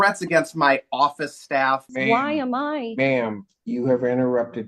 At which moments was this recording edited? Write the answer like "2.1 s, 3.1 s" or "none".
1.9 s